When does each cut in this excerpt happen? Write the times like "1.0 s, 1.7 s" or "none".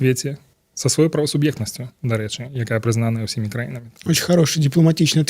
3.8 s